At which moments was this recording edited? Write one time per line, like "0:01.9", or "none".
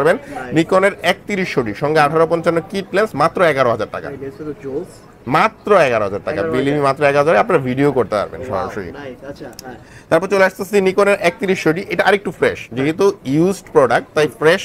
none